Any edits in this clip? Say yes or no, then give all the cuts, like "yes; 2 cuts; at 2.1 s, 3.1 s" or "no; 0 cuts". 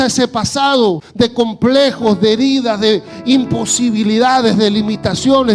yes; 1 cut; at 1.0 s